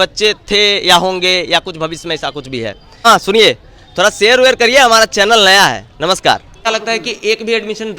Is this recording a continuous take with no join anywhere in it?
no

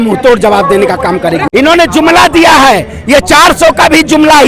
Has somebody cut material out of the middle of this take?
yes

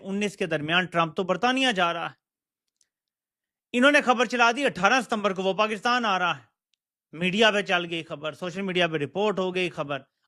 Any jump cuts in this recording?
no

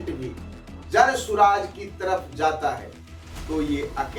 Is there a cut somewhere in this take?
no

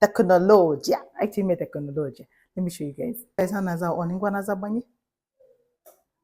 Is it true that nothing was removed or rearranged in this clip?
yes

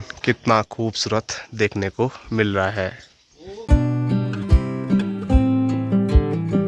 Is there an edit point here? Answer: no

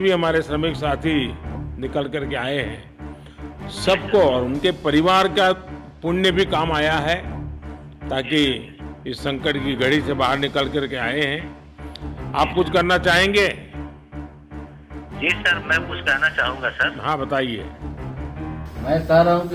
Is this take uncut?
yes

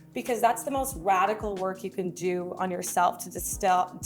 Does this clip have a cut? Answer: no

